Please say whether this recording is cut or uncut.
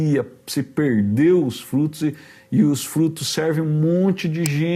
uncut